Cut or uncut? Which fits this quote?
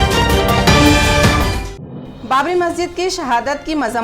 uncut